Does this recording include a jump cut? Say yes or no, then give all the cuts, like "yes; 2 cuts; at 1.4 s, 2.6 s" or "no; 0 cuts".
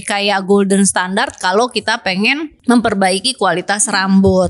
yes; 1 cut; at 2.5 s